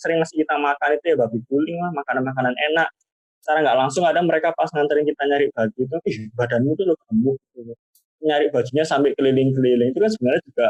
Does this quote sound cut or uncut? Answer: uncut